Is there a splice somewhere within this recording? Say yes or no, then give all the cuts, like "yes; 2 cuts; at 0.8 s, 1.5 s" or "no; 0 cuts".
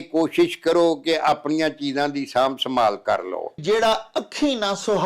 yes; 1 cut; at 3.6 s